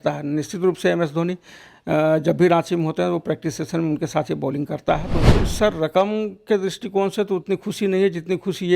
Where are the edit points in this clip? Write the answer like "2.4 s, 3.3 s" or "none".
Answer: 5.2 s